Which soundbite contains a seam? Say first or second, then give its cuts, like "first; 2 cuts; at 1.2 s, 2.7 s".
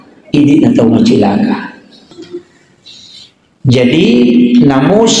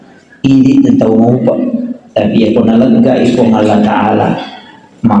first; 1 cut; at 2.2 s